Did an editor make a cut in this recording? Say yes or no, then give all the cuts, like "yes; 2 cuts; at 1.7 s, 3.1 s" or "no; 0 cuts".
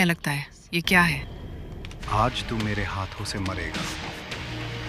yes; 1 cut; at 2.0 s